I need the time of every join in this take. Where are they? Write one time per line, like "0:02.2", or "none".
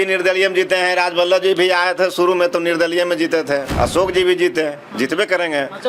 0:03.7